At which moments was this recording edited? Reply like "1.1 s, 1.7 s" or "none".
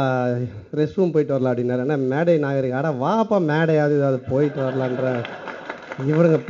none